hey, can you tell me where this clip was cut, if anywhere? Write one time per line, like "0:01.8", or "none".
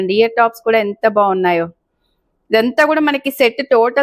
none